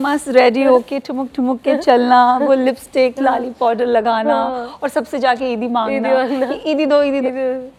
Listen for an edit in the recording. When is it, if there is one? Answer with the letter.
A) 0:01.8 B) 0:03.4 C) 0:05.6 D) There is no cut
D